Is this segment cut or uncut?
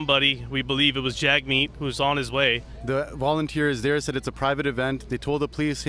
cut